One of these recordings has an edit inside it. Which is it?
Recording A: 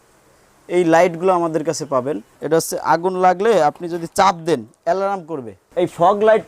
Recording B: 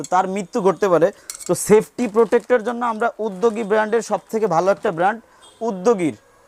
A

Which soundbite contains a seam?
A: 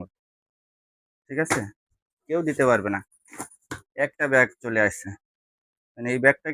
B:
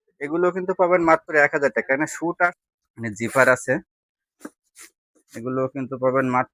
B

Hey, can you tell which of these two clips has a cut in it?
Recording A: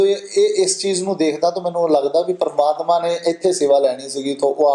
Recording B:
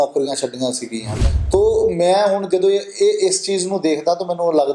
B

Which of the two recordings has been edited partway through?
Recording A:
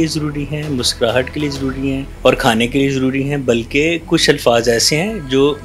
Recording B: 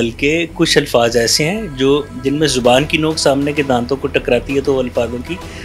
A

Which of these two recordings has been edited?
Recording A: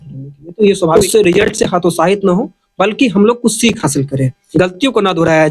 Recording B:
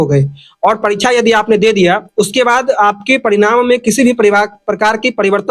A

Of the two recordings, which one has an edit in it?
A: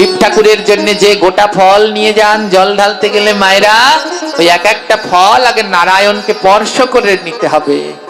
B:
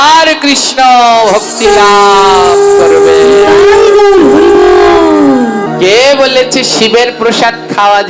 B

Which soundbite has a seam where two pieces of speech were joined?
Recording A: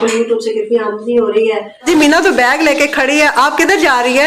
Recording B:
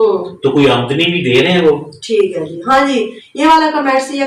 A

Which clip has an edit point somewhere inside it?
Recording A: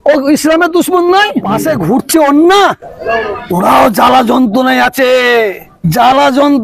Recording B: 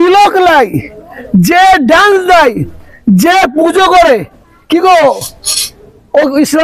A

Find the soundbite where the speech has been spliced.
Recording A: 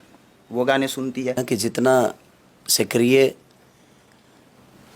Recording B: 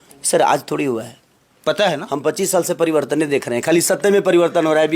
A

